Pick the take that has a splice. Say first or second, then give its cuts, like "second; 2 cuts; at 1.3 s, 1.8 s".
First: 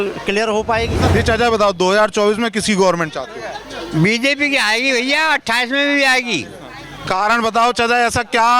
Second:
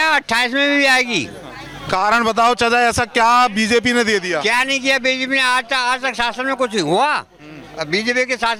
first; 1 cut; at 1.0 s